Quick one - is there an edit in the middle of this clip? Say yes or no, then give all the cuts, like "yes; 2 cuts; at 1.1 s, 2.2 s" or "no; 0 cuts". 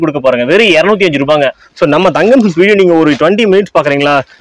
yes; 1 cut; at 1.6 s